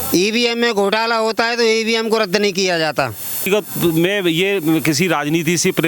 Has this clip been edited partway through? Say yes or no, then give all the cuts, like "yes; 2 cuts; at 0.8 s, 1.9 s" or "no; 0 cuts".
yes; 1 cut; at 3.5 s